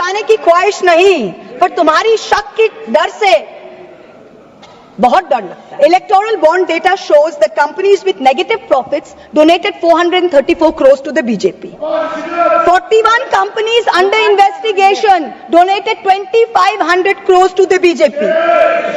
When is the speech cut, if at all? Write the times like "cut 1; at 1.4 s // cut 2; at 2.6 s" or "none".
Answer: cut 1; at 5.6 s